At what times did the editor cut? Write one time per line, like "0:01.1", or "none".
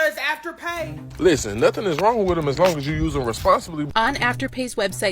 0:01.1
0:03.9

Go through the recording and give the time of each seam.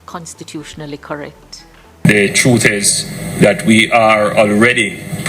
0:01.9

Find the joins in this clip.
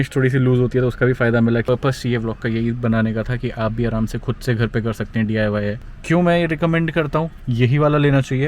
0:01.6
0:05.9
0:07.4

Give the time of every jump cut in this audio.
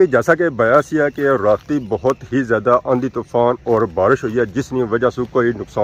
none

